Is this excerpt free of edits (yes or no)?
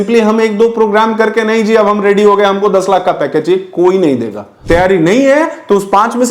no